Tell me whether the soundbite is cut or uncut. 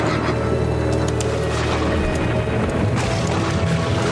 cut